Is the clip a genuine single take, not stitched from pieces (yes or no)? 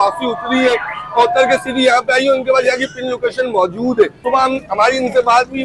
no